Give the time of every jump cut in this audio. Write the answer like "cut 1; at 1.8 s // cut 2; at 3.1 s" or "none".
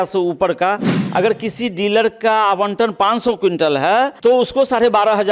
cut 1; at 0.9 s // cut 2; at 4.1 s